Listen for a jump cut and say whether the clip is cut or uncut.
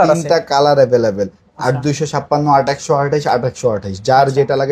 uncut